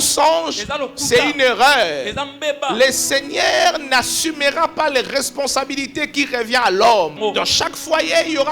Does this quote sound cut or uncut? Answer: cut